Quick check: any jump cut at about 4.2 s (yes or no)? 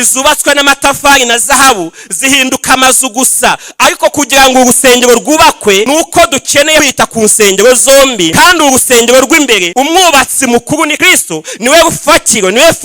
no